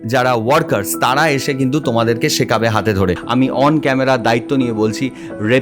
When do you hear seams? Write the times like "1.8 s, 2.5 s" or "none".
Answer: 3.2 s